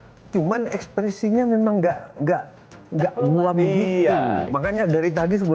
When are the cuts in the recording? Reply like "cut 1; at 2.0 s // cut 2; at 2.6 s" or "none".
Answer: cut 1; at 4.5 s